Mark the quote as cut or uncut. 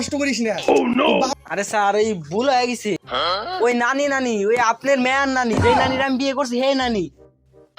cut